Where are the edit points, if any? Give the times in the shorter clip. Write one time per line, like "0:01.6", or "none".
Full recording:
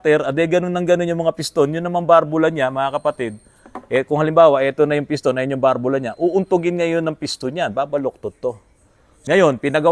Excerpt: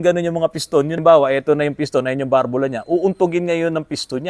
0:01.0